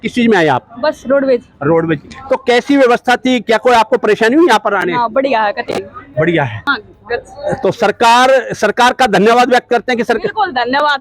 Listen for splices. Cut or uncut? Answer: cut